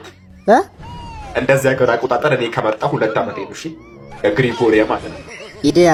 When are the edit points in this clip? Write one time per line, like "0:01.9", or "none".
none